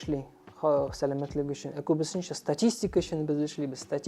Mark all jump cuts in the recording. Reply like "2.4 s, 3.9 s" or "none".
none